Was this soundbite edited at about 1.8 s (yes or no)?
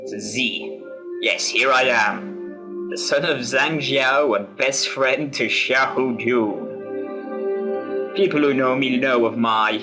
no